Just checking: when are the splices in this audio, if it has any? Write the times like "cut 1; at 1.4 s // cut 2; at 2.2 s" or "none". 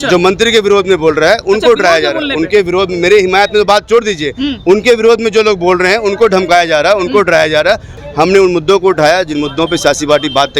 cut 1; at 7.9 s

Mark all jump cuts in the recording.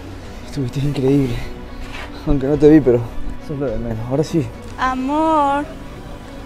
none

